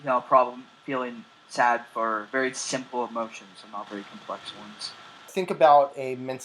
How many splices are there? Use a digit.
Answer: 2